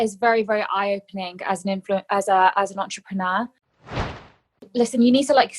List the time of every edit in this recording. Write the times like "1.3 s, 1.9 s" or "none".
4.0 s